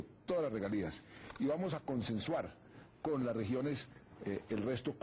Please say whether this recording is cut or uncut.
uncut